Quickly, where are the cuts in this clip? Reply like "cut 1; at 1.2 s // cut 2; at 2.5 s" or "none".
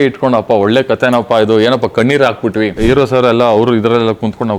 cut 1; at 2.8 s